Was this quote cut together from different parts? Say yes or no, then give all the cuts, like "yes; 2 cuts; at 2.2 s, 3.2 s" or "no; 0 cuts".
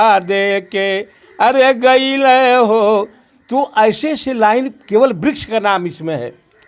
no; 0 cuts